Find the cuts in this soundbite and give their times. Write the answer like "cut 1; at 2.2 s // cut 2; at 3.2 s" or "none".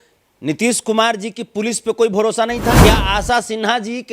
cut 1; at 2.8 s